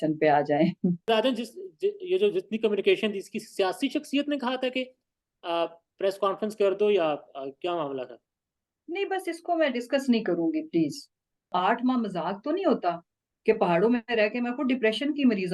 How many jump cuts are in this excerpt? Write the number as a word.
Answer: two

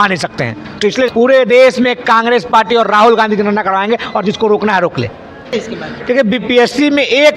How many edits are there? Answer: two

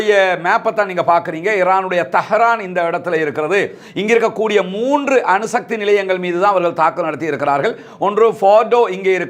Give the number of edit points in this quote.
zero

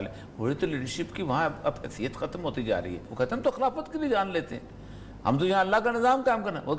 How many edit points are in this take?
one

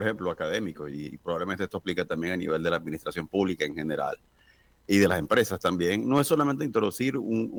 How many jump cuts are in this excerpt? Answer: zero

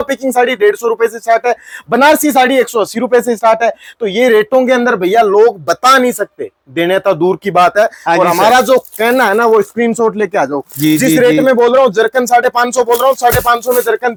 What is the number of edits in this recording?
zero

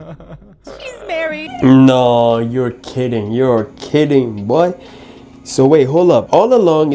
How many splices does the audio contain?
zero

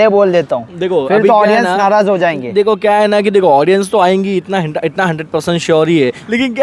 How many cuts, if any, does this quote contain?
zero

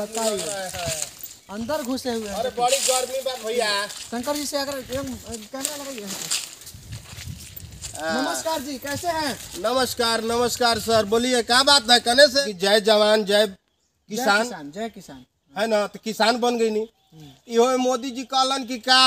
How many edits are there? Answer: one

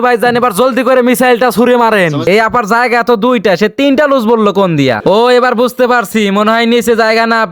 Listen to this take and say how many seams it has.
two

